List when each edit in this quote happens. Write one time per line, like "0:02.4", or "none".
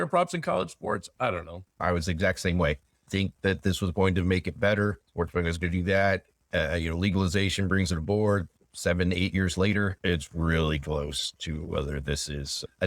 0:01.6
0:03.1
0:05.0
0:08.5
0:10.0